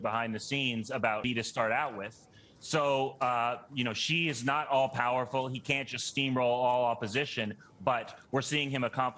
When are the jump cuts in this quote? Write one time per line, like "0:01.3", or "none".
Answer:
0:01.2